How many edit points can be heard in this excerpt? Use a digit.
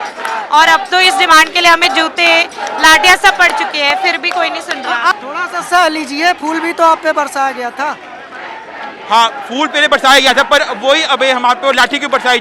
1